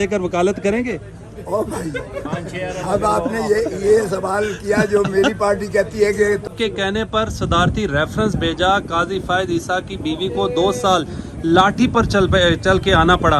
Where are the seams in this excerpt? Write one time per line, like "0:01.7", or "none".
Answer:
0:06.5